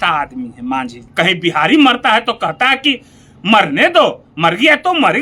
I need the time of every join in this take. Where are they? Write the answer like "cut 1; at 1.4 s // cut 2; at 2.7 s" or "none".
cut 1; at 1.0 s